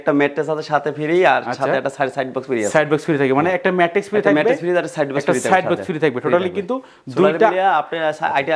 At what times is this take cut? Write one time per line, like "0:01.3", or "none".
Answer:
none